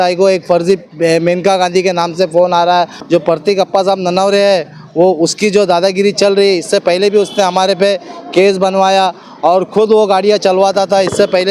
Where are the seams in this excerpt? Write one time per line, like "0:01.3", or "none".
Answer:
0:03.0